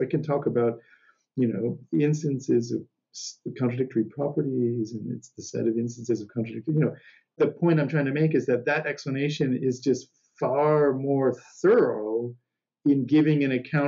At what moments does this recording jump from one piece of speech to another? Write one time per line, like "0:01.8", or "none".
0:07.4

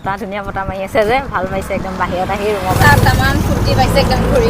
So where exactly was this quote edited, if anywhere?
0:02.8

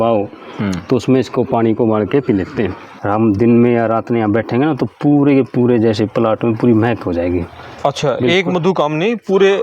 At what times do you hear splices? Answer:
0:03.0

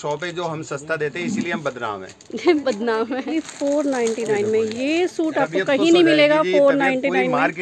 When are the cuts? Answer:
0:03.4

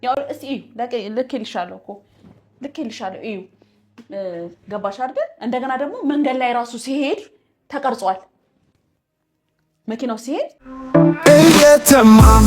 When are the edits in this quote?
0:10.7

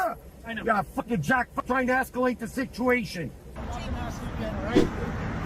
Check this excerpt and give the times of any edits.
0:03.5

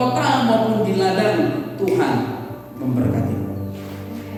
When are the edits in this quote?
none

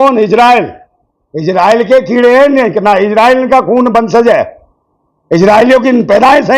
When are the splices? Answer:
none

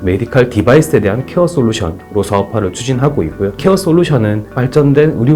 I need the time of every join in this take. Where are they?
none

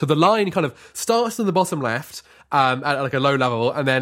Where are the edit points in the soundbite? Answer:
none

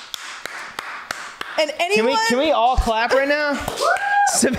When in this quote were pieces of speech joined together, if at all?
none

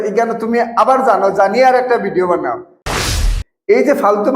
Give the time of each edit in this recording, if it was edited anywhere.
0:03.0

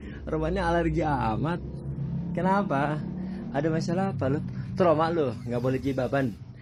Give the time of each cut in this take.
none

